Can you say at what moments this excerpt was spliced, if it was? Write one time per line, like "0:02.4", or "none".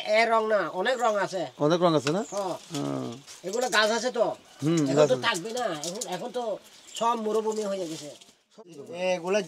0:08.6